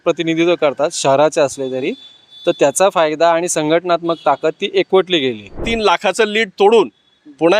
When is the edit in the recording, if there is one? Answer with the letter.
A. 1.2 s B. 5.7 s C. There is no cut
B